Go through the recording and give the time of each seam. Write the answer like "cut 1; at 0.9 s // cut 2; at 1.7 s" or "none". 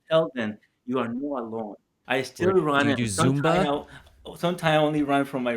cut 1; at 1.9 s